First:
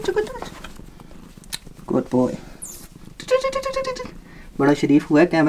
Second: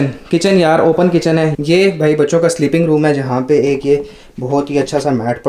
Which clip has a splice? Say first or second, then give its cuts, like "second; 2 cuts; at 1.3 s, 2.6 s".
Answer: second; 1 cut; at 1.6 s